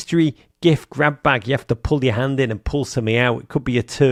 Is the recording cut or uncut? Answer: uncut